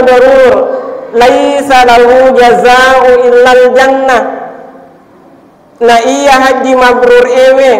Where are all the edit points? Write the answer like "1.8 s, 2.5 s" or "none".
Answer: none